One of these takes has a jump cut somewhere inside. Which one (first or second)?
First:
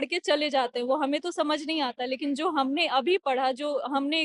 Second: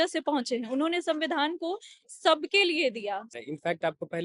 second